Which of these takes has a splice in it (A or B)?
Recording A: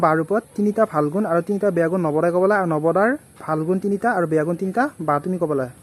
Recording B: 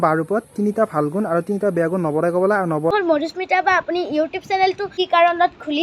B